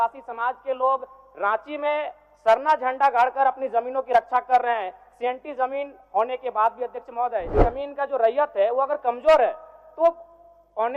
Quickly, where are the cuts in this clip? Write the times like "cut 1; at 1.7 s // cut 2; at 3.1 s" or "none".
cut 1; at 7.6 s